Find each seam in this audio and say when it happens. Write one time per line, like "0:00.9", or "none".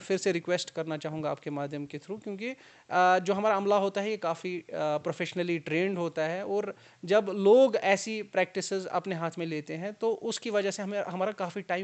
none